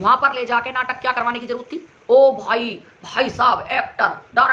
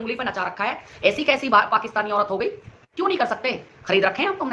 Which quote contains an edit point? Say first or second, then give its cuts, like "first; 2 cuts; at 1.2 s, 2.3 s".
second; 1 cut; at 2.8 s